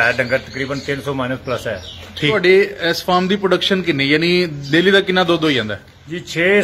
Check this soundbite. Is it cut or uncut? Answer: cut